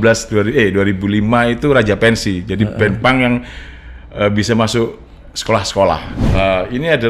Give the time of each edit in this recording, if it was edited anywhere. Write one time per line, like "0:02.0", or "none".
0:06.2